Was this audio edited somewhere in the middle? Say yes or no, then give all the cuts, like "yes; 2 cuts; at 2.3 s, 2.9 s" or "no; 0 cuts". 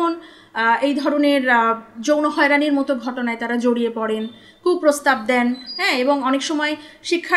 no; 0 cuts